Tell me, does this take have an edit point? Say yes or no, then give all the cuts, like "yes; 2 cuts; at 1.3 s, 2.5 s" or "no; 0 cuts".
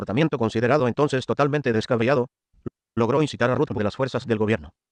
no; 0 cuts